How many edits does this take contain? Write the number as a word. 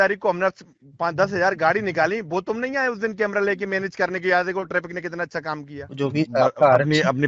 one